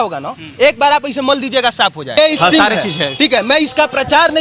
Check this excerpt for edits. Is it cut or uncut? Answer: cut